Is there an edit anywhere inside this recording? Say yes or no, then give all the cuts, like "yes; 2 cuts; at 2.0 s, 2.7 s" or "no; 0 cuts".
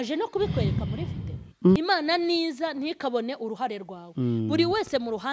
yes; 1 cut; at 1.8 s